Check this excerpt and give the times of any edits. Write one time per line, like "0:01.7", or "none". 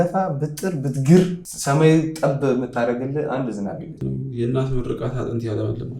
0:01.5
0:04.0